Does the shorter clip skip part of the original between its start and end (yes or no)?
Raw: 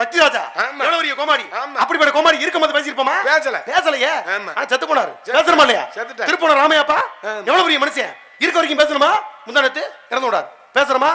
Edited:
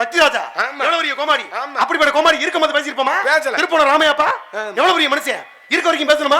yes